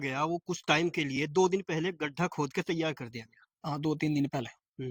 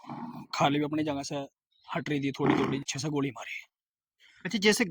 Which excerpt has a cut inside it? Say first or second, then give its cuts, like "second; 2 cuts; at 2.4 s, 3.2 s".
second; 1 cut; at 2.9 s